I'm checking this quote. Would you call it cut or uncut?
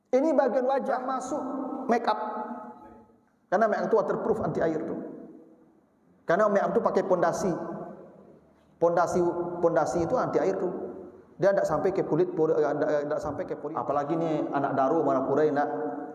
cut